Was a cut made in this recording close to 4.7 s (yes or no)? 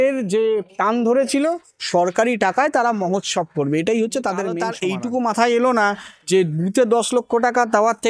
yes